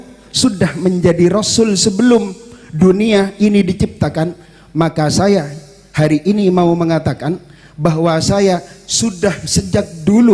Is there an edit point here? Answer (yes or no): no